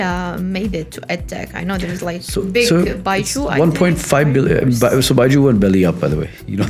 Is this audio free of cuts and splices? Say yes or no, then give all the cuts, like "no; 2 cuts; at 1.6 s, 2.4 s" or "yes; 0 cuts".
yes; 0 cuts